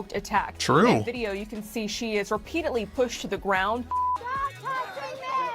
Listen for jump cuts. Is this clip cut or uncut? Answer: cut